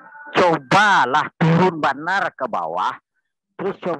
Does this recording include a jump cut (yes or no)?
no